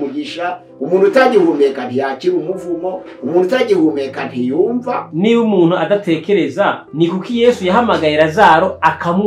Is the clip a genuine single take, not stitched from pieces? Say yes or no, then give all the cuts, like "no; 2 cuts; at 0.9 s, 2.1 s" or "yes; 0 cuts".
no; 2 cuts; at 5.1 s, 6.8 s